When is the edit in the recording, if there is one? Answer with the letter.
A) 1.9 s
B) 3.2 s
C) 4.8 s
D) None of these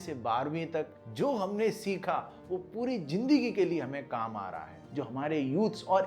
C